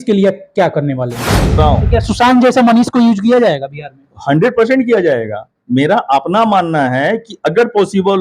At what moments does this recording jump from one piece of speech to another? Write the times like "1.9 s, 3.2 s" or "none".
1.6 s